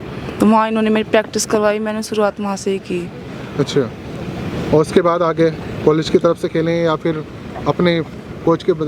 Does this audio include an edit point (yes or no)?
no